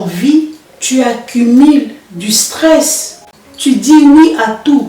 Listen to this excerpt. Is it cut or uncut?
cut